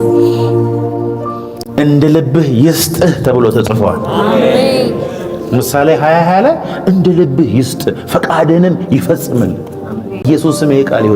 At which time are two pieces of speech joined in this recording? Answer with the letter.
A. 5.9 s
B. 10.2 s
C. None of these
B